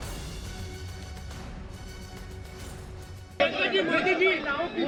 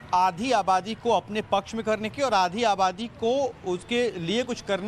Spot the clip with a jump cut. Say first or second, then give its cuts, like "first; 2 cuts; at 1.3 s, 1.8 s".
second; 1 cut; at 3.6 s